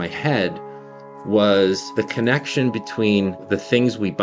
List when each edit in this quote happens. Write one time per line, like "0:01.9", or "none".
0:01.8
0:03.4

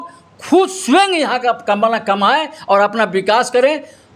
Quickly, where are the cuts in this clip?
none

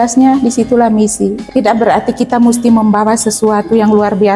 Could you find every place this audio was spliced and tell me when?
0:01.4

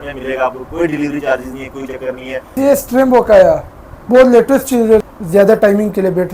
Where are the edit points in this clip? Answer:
0:02.6
0:05.0

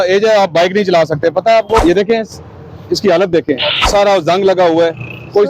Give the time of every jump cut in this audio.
0:01.8
0:03.8

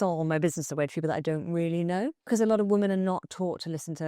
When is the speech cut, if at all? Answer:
0:02.3

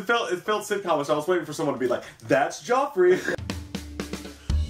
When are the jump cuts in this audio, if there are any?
0:03.3

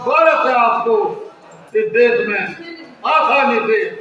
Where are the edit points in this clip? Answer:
none

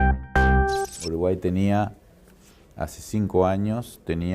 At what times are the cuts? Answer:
0:00.9

